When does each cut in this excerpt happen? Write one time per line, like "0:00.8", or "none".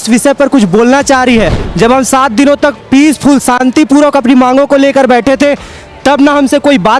0:01.6